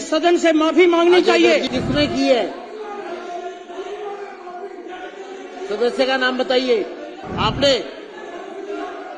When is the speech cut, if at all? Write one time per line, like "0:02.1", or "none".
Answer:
0:01.7
0:07.2